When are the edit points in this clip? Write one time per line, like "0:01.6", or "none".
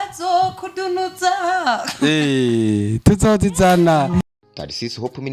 0:04.2